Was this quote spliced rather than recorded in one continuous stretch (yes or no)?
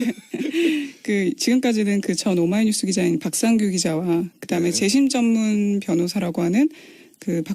yes